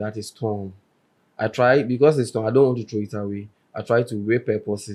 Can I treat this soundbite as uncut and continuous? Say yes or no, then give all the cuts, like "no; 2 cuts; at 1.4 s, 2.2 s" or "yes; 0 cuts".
yes; 0 cuts